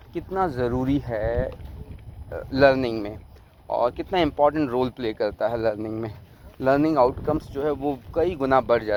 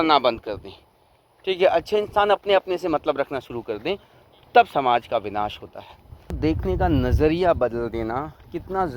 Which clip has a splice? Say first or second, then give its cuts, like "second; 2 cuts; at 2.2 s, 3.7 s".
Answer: second; 1 cut; at 6.4 s